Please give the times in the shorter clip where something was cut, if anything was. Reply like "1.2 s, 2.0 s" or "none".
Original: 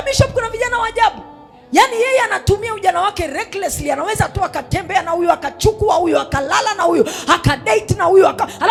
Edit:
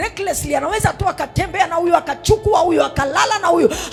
none